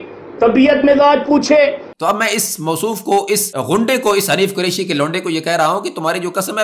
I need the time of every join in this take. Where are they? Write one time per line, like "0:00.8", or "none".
0:01.9
0:03.5